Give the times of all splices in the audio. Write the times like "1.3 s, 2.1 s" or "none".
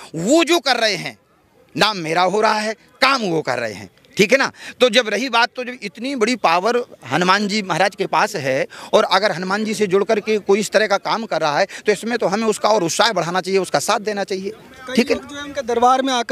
none